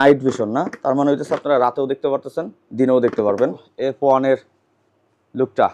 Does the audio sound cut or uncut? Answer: cut